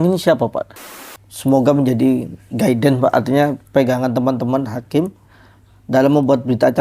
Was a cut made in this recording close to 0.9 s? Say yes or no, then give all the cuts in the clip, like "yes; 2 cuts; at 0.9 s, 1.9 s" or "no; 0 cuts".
yes; 1 cut; at 0.9 s